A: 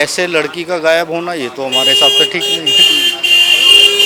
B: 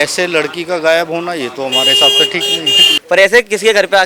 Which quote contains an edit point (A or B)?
B